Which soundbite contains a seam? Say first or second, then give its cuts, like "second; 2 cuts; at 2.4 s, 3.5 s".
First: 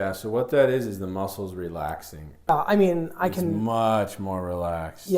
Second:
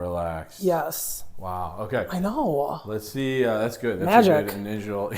first; 1 cut; at 2.5 s